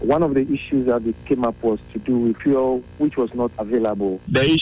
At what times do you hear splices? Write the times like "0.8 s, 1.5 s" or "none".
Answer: 2.4 s, 3.6 s